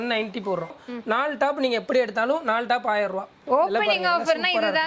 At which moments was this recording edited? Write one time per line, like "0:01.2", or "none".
0:00.7
0:03.4

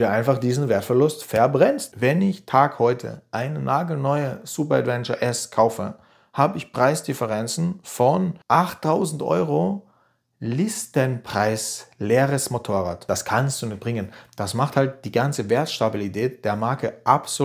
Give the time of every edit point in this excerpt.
0:01.9
0:13.0

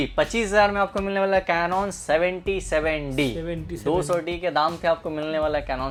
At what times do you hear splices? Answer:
none

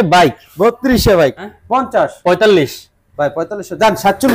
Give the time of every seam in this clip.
0:01.4

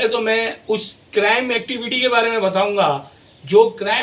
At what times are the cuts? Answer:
none

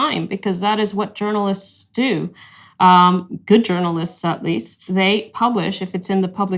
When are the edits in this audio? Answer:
0:04.8

